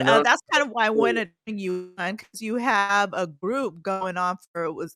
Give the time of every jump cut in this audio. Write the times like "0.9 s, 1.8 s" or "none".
none